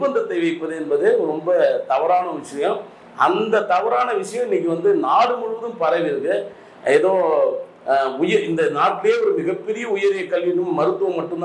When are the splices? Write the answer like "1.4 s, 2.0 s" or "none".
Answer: none

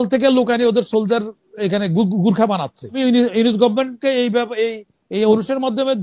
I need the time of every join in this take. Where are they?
3.0 s

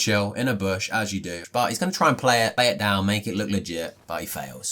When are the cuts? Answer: 1.4 s, 2.5 s

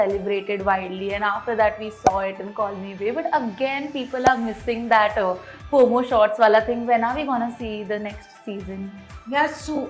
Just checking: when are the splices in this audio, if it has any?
none

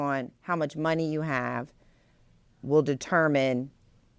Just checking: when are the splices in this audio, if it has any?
none

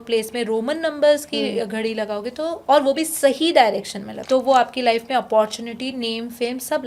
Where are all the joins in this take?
4.1 s

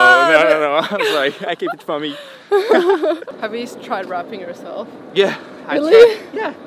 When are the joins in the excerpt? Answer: 3.3 s

